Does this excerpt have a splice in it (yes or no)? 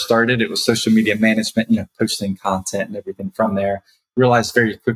no